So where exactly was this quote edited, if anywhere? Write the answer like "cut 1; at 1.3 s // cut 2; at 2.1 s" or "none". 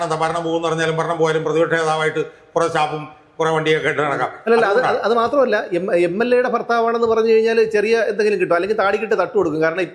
none